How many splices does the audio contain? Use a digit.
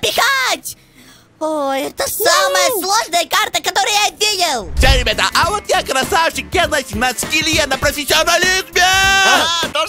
1